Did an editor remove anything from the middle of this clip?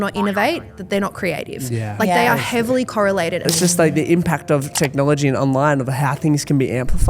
yes; 2 cuts; at 3.5 s, 4.7 s

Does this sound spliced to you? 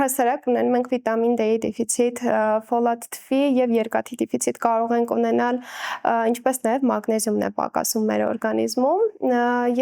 no; 0 cuts

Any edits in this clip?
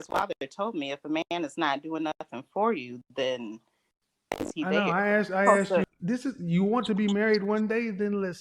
yes; 1 cut; at 5.8 s

